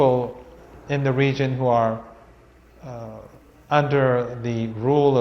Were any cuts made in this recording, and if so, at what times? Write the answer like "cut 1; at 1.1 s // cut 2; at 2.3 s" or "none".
cut 1; at 2.1 s